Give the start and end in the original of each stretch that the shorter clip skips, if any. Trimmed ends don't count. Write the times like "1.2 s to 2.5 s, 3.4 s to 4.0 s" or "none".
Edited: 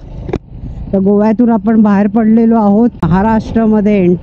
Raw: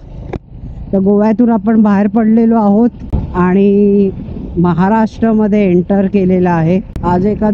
3.0 s to 4.7 s